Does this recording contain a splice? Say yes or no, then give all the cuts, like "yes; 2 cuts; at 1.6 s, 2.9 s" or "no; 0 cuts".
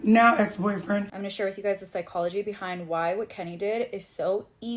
yes; 1 cut; at 1.2 s